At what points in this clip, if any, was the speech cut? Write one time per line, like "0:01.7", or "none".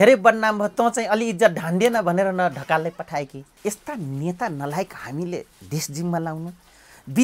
0:03.5